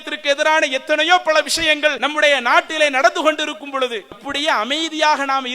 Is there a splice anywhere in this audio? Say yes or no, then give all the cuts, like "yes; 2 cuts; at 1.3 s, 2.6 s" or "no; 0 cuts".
yes; 2 cuts; at 2.0 s, 4.3 s